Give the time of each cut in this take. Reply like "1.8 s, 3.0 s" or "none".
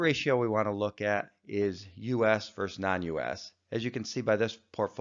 2.3 s